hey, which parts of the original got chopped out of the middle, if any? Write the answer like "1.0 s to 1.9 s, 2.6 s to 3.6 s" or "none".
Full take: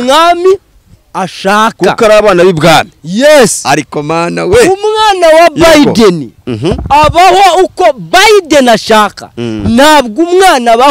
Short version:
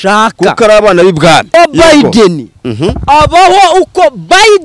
2.9 s to 5.4 s